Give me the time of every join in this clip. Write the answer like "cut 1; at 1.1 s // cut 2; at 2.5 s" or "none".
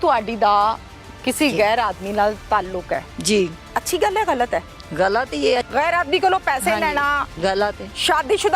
cut 1; at 3.6 s // cut 2; at 5.7 s // cut 3; at 7.4 s